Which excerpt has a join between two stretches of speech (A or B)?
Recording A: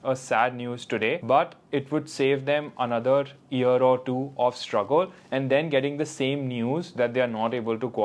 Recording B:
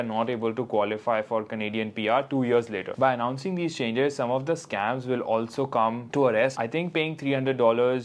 B